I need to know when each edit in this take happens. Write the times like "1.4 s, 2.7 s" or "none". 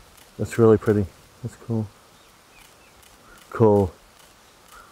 1.2 s